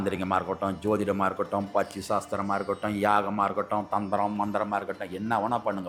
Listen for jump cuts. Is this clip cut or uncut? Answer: uncut